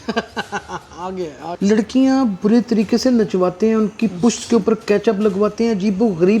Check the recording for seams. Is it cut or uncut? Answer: cut